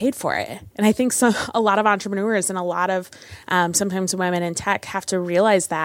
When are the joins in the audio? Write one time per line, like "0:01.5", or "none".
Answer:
none